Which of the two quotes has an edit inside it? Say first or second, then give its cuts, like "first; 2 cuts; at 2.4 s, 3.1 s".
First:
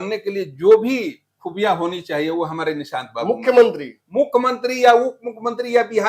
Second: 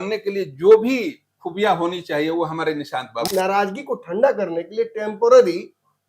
second; 1 cut; at 3.1 s